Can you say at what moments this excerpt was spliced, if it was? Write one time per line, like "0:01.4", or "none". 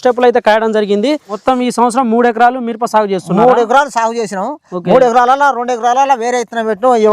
0:01.4

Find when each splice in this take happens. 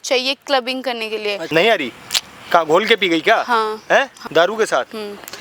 0:01.4
0:04.2

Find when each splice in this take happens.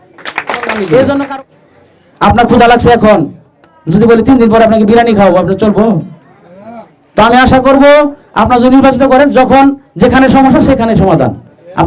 0:01.3

